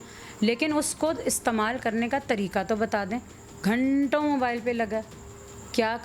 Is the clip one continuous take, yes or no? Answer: yes